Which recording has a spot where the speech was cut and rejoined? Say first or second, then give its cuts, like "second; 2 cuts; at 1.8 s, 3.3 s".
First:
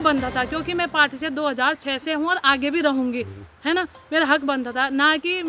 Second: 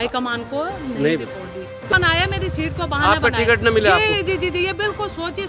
second; 1 cut; at 1.9 s